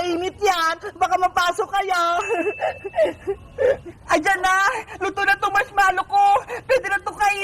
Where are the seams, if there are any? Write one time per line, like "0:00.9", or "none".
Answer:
0:03.9

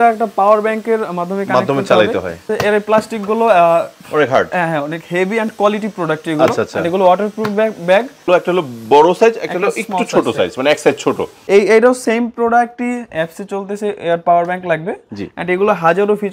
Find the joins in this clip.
0:02.5
0:08.3
0:11.3

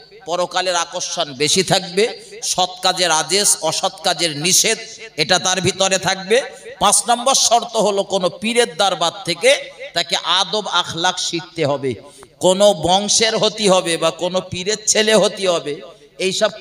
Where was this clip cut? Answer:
none

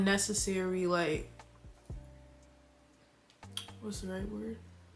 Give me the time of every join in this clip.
none

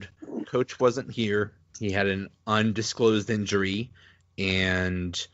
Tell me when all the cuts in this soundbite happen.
0:01.6

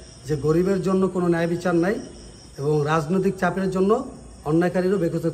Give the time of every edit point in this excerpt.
none

